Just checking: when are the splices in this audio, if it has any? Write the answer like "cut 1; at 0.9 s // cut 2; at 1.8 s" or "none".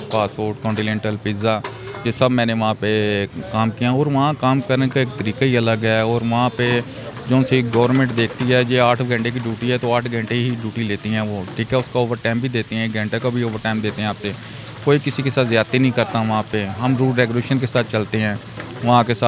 none